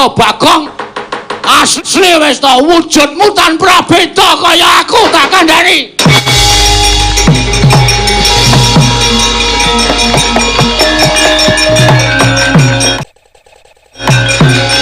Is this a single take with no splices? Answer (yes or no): yes